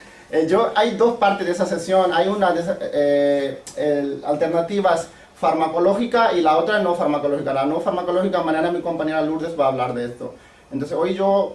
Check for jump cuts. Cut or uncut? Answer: cut